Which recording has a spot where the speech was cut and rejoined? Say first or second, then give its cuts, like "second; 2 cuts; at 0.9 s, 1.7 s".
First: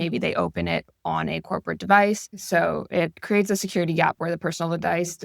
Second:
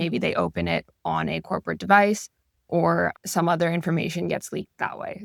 first; 1 cut; at 2.3 s